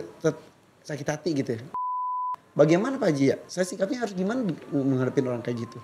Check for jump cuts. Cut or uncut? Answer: cut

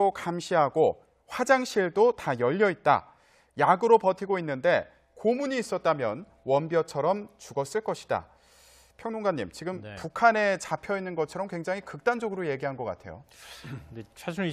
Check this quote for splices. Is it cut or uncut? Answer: uncut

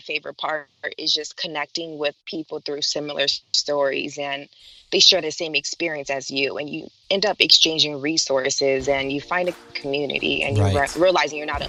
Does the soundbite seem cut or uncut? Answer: uncut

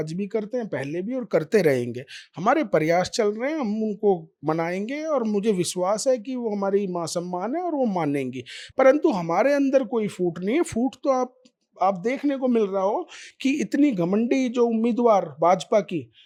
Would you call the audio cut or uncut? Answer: uncut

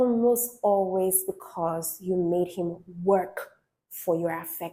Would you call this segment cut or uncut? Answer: uncut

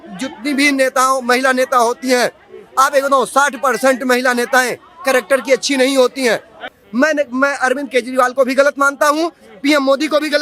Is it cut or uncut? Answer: cut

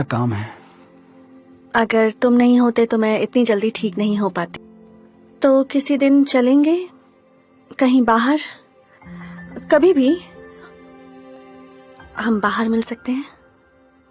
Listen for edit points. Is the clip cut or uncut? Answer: cut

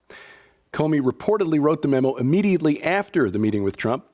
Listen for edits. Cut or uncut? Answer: cut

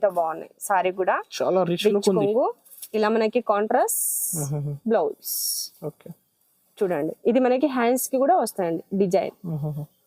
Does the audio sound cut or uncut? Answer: uncut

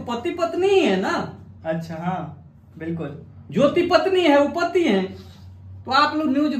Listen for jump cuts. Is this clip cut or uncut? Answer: uncut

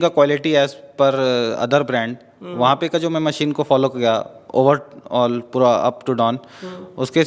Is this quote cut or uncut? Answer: uncut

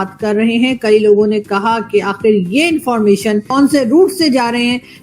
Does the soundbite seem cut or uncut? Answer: cut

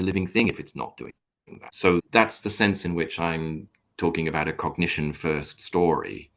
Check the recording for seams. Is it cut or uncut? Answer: cut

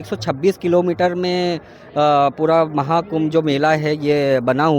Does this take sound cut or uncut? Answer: uncut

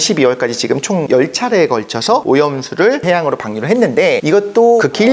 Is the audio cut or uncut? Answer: uncut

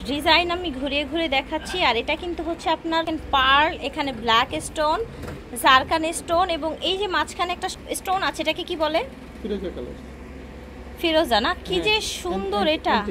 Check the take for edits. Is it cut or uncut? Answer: cut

